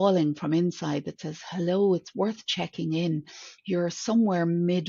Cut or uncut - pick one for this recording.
uncut